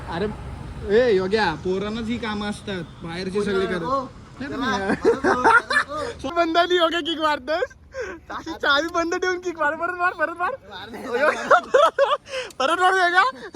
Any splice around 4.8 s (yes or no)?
no